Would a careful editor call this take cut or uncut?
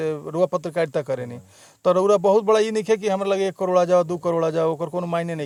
uncut